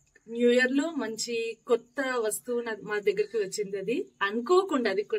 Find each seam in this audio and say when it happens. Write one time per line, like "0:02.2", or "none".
none